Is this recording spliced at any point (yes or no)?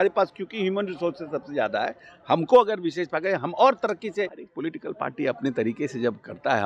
yes